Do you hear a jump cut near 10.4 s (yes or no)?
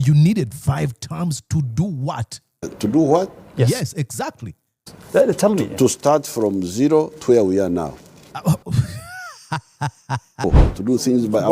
yes